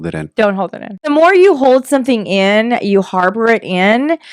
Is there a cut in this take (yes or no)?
yes